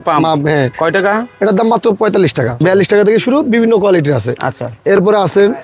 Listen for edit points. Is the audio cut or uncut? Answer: cut